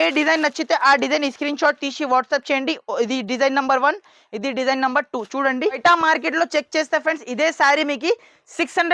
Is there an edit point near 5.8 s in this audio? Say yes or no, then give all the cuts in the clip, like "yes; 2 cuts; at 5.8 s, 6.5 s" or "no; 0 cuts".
yes; 1 cut; at 5.8 s